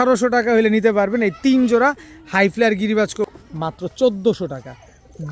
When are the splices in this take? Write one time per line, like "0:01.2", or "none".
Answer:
0:03.3